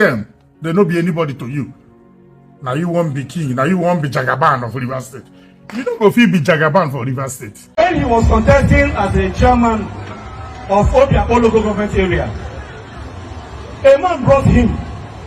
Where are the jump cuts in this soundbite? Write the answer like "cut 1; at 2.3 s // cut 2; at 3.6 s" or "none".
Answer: cut 1; at 7.8 s